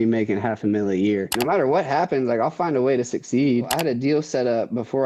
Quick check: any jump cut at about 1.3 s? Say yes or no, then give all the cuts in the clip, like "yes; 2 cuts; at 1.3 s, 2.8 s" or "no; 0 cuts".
yes; 2 cuts; at 1.3 s, 3.7 s